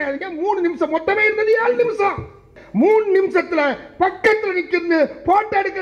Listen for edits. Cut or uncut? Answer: cut